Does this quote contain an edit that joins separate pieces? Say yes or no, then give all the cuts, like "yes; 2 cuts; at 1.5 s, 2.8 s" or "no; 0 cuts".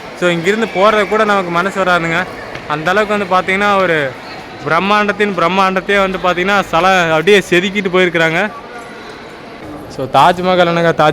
yes; 1 cut; at 9.7 s